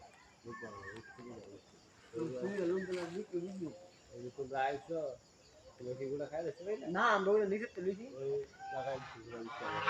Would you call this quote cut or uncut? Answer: uncut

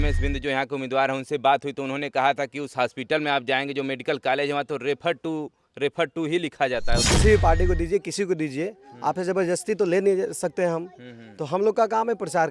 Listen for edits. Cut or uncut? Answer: cut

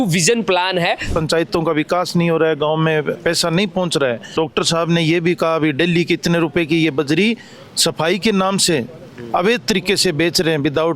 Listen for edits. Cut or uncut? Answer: cut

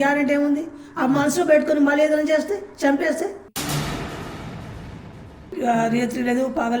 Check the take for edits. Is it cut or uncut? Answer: cut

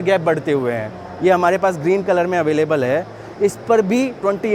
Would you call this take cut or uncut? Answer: uncut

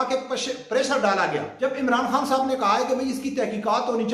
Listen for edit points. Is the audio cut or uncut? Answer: cut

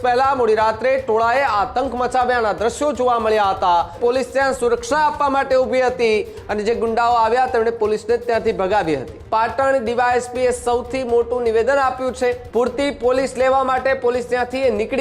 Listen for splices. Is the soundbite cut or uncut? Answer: cut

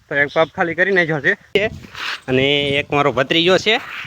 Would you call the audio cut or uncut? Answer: cut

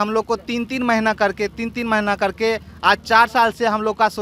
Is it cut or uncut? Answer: uncut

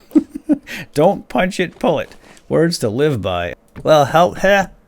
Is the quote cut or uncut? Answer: cut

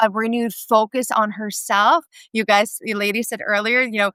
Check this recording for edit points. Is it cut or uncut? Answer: uncut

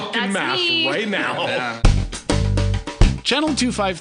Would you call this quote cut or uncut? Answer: cut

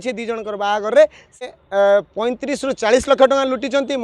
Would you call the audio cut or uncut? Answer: cut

